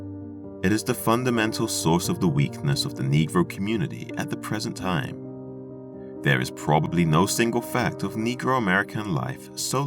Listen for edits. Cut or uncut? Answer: cut